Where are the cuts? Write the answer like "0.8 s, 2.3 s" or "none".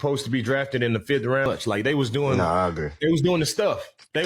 1.5 s